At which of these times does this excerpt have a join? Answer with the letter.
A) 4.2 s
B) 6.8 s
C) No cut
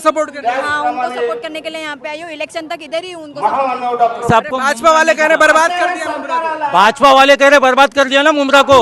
A